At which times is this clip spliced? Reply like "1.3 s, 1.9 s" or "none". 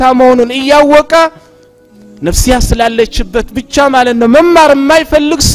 none